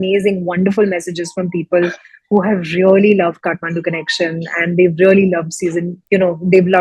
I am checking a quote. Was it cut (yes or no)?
no